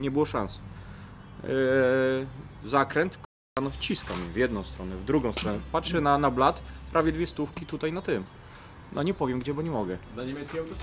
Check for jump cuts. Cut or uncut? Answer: uncut